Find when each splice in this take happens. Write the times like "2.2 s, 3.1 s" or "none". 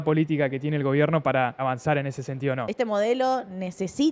1.6 s, 2.7 s